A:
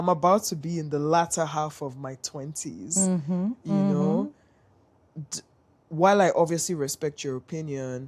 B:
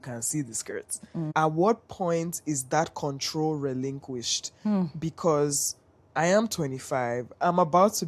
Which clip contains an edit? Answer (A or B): B